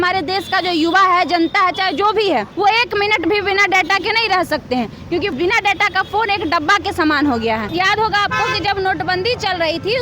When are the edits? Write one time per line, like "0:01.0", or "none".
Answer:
0:02.5
0:05.3
0:07.7